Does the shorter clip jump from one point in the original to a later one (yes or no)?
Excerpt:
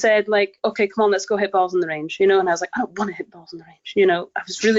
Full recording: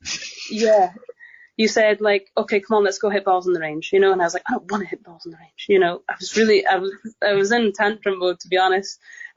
no